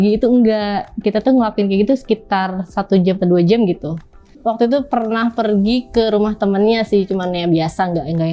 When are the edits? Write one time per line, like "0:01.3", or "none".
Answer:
0:04.4